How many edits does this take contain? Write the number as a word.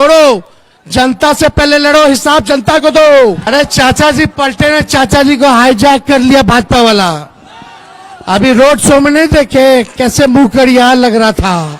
one